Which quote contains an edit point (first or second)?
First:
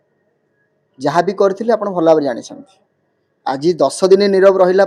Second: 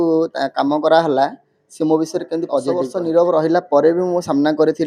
second